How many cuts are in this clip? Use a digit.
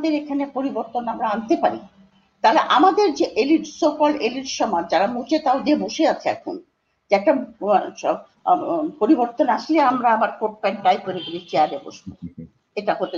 0